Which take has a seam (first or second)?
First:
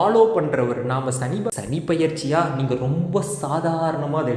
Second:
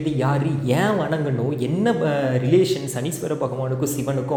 first